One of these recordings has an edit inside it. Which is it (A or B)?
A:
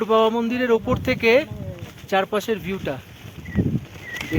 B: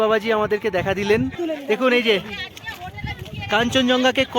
B